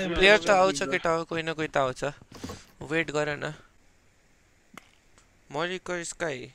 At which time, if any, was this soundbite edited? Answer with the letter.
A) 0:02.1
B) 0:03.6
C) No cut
B